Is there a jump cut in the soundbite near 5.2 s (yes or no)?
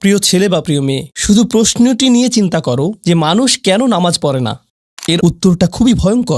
yes